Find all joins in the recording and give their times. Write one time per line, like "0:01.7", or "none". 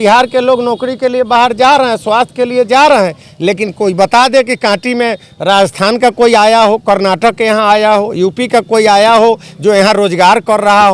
none